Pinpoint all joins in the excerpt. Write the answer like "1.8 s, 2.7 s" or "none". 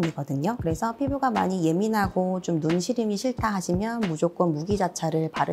none